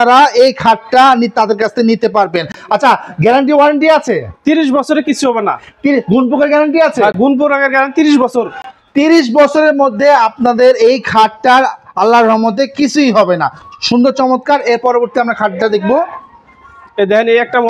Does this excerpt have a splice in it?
no; 0 cuts

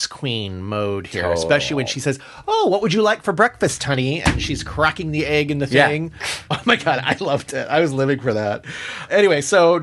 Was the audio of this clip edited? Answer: no; 0 cuts

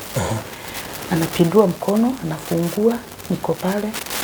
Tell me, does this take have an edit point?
no; 0 cuts

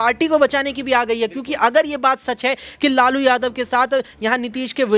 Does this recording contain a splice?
no; 0 cuts

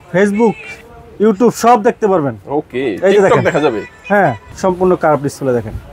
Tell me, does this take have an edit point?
yes; 1 cut; at 4.5 s

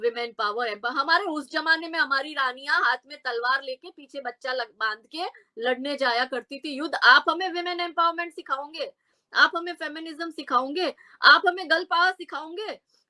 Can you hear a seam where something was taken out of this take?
no; 0 cuts

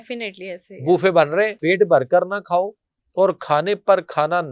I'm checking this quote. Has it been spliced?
yes; 1 cut; at 1.6 s

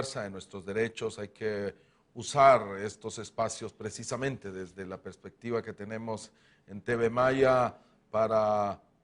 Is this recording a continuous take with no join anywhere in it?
no; 1 cut; at 6.3 s

